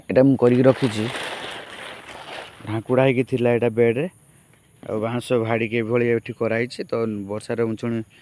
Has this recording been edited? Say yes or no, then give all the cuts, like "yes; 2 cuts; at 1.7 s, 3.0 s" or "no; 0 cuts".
no; 0 cuts